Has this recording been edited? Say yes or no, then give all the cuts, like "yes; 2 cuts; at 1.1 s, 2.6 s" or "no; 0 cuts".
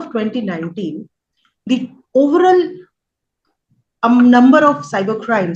no; 0 cuts